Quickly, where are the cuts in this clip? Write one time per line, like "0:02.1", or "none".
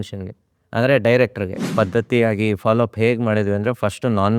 0:01.7